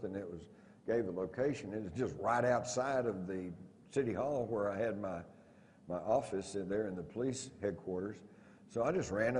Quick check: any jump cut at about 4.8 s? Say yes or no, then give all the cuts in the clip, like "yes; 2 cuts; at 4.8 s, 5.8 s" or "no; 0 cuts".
yes; 1 cut; at 4.8 s